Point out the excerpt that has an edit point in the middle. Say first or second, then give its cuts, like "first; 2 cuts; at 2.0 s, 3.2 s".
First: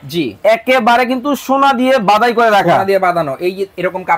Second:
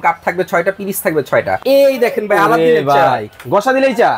second; 1 cut; at 1.6 s